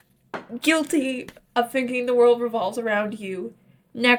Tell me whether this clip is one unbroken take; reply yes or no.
yes